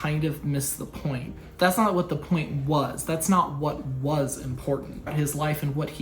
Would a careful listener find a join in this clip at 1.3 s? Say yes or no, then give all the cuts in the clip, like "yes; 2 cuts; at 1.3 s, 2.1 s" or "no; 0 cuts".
yes; 2 cuts; at 1.3 s, 5.1 s